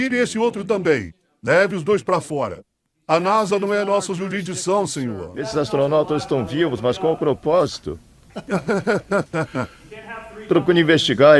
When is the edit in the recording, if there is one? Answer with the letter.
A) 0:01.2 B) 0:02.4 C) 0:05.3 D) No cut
C